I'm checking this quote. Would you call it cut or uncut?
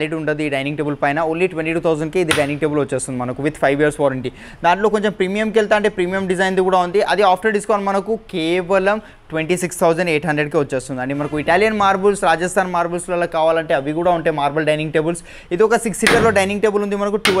uncut